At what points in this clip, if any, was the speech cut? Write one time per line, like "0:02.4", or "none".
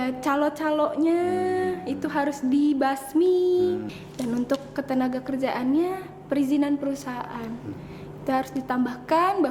0:04.0

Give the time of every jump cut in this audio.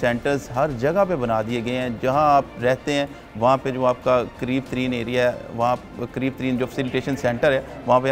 none

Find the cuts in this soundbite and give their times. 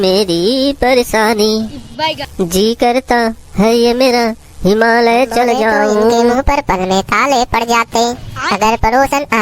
0:06.3

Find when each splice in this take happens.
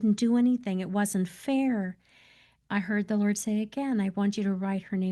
0:02.5

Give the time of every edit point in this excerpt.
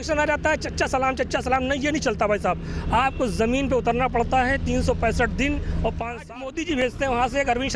0:06.3

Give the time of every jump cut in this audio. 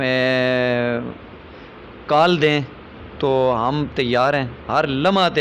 none

